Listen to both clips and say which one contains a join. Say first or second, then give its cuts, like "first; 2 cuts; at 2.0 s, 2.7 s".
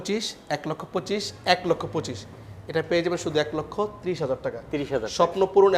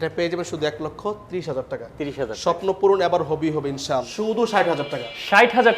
second; 1 cut; at 4.0 s